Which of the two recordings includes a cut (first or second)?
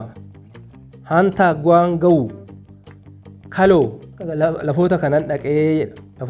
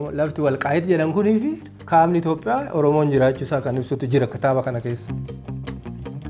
second